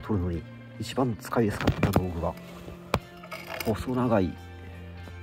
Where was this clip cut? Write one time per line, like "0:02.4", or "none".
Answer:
none